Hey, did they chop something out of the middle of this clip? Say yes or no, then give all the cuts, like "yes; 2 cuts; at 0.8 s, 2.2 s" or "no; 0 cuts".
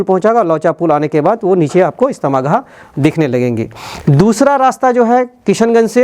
no; 0 cuts